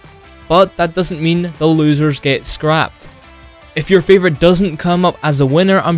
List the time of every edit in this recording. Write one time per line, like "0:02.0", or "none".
0:04.8